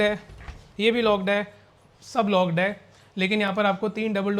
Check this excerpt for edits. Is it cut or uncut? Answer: uncut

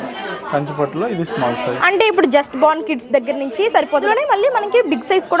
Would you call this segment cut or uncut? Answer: cut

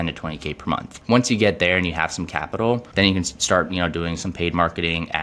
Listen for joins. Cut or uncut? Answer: cut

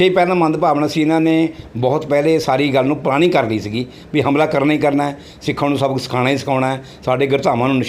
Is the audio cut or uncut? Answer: uncut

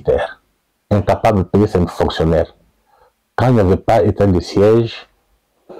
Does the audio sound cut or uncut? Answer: uncut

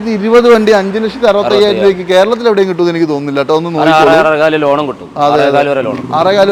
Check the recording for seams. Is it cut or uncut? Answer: uncut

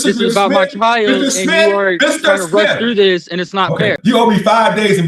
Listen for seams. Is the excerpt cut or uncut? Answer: cut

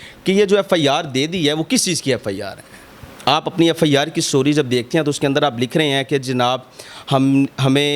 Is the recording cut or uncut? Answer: uncut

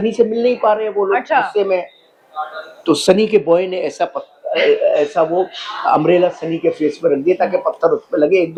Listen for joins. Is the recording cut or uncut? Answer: uncut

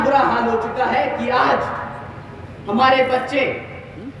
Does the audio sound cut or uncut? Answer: uncut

